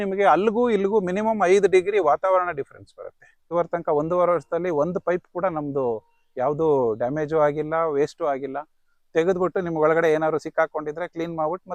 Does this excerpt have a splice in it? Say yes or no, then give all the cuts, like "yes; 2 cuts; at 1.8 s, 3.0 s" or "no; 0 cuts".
yes; 1 cut; at 3.5 s